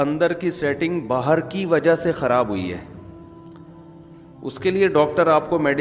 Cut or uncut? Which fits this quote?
cut